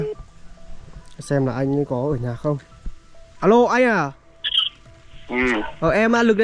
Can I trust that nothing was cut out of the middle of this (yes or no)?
no